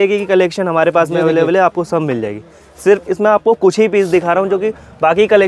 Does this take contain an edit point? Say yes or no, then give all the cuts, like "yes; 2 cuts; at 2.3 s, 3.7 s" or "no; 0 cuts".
no; 0 cuts